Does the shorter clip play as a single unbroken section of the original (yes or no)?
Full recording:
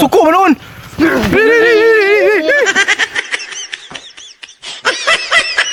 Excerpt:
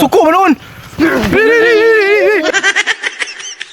no